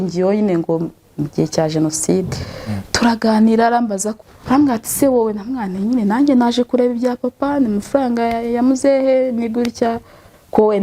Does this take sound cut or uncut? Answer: cut